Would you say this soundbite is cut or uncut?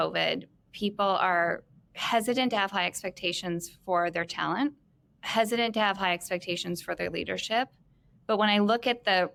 uncut